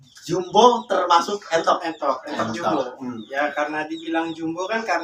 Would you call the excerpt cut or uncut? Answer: uncut